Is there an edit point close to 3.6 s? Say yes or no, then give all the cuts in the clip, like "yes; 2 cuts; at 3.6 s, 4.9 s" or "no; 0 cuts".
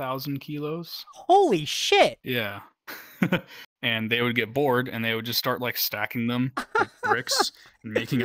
yes; 1 cut; at 3.6 s